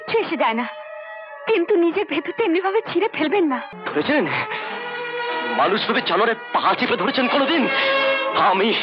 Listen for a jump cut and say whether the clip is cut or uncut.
cut